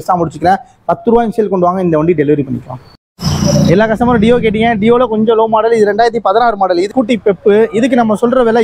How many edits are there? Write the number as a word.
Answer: two